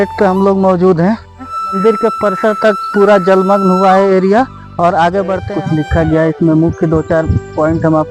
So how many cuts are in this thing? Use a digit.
2